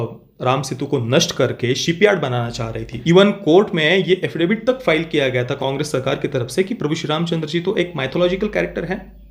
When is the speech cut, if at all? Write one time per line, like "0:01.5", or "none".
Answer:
0:02.9
0:05.5